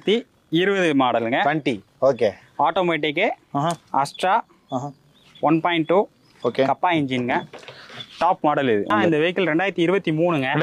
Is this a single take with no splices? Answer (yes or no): no